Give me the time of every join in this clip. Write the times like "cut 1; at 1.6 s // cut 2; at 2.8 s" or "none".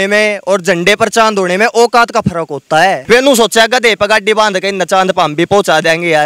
cut 1; at 3.0 s